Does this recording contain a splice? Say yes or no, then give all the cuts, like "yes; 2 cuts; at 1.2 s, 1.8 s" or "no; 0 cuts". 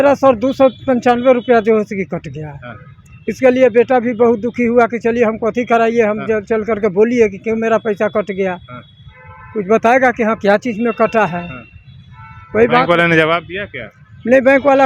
no; 0 cuts